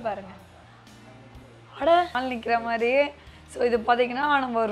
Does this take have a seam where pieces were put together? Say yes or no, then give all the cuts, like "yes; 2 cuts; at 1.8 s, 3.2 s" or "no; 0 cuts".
yes; 1 cut; at 2.2 s